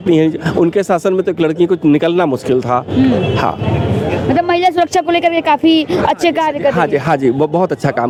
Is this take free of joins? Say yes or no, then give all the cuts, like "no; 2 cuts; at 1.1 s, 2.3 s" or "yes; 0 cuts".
yes; 0 cuts